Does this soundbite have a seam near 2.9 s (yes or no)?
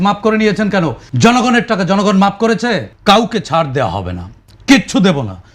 yes